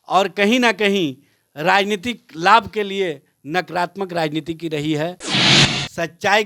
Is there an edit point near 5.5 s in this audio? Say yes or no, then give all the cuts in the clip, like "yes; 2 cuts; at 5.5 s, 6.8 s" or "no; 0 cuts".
yes; 1 cut; at 5.5 s